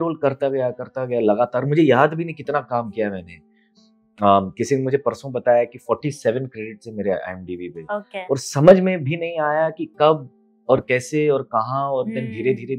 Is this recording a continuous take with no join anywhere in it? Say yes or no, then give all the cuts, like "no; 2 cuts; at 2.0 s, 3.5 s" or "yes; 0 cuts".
yes; 0 cuts